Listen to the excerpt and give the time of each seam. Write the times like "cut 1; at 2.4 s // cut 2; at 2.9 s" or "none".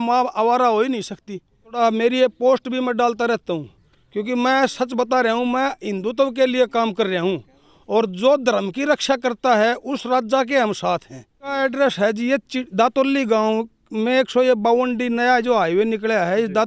cut 1; at 1.7 s // cut 2; at 11.5 s

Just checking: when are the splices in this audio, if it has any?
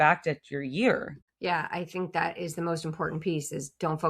cut 1; at 1.2 s

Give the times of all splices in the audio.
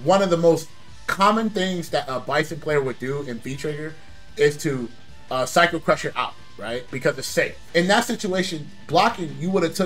none

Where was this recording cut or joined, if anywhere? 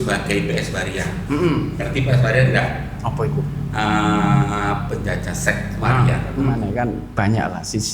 cut 1; at 6.6 s

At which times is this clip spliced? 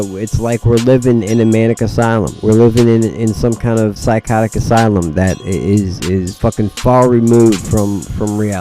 cut 1; at 2.3 s // cut 2; at 4.0 s // cut 3; at 5.4 s // cut 4; at 6.3 s

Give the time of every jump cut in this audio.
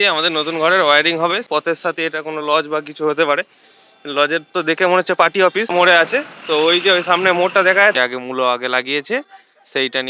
cut 1; at 1.4 s // cut 2; at 5.7 s // cut 3; at 8.0 s

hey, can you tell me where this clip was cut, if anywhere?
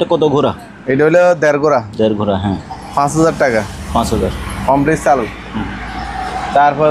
none

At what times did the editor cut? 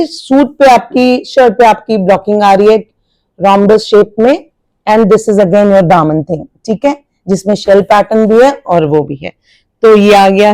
none

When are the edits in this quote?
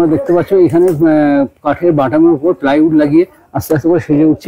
none

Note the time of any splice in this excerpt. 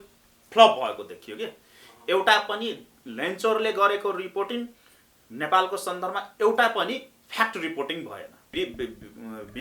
cut 1; at 8.4 s

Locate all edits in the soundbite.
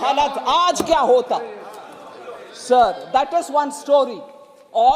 none

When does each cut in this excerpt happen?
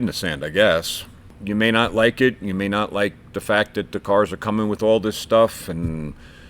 cut 1; at 1.4 s

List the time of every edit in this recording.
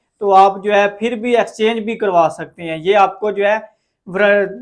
none

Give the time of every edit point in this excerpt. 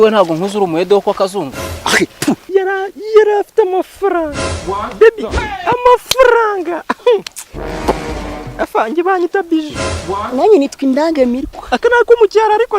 cut 1; at 2.4 s

